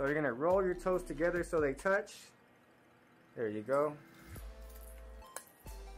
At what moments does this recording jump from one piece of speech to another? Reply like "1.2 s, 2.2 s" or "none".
4.1 s